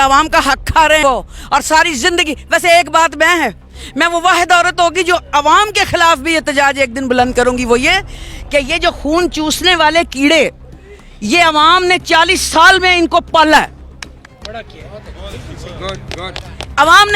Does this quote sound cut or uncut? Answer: cut